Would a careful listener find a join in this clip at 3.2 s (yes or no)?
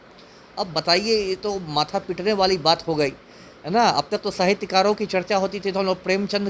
no